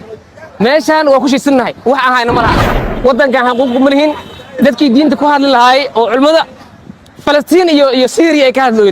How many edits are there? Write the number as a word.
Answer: one